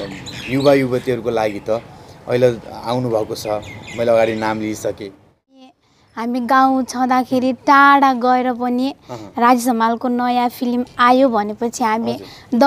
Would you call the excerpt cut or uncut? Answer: cut